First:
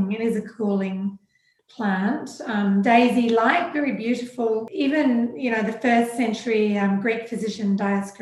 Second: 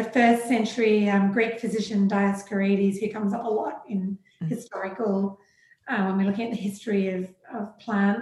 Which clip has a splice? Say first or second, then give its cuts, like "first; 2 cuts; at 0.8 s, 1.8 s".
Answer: first; 1 cut; at 4.7 s